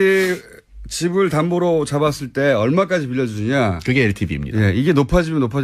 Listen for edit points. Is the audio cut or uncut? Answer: cut